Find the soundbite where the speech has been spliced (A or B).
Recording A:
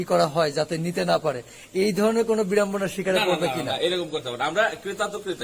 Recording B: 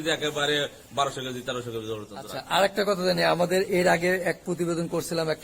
B